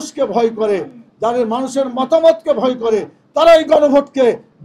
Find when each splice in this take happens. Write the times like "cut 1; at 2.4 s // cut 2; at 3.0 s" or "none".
none